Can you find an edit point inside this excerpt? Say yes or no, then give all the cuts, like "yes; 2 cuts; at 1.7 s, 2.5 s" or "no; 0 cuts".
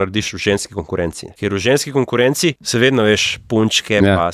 yes; 2 cuts; at 1.3 s, 2.6 s